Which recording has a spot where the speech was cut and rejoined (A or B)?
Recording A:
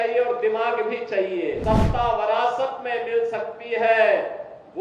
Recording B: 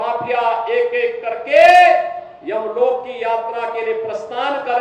A